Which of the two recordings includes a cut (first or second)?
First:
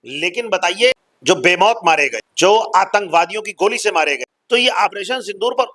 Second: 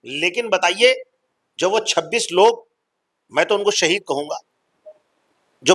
first